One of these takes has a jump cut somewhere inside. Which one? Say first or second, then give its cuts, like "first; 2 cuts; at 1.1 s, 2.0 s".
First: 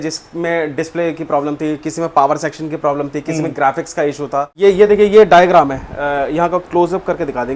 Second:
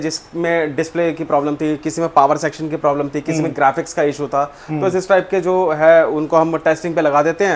first; 1 cut; at 4.5 s